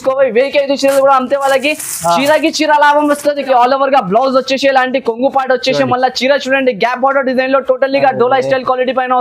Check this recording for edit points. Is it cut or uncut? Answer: cut